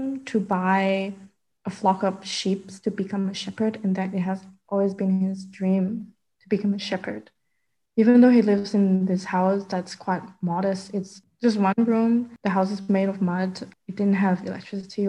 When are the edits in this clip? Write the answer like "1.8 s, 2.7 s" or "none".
11.2 s, 13.6 s

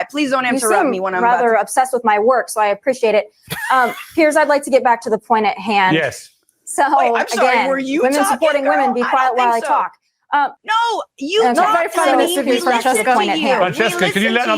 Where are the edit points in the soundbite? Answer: 10.6 s

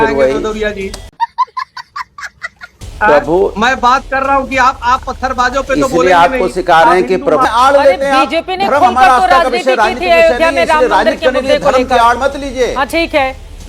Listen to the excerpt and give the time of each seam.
7.4 s

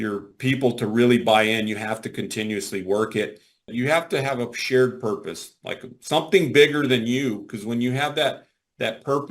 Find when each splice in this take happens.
3.7 s

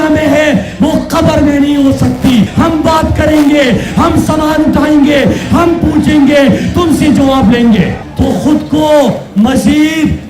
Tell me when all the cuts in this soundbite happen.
2.5 s, 8.0 s

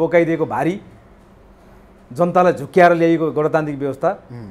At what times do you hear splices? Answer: none

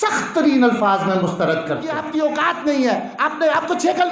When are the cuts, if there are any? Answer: 2.0 s

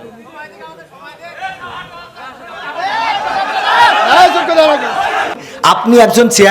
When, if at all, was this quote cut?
5.4 s

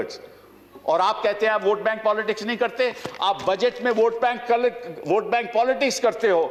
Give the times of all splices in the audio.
none

